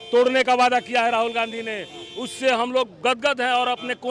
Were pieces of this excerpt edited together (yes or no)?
no